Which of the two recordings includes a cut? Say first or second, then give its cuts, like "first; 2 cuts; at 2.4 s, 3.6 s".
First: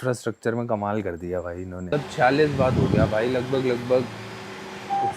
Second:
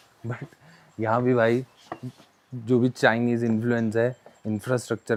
first; 1 cut; at 1.9 s